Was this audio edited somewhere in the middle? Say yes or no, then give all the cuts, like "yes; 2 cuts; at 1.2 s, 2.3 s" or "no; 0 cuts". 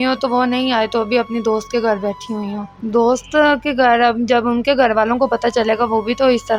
yes; 1 cut; at 2.7 s